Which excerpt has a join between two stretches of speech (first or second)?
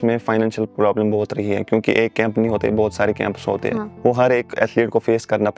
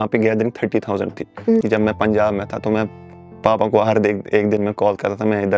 second